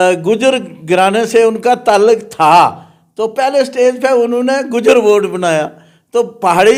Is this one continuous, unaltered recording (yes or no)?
yes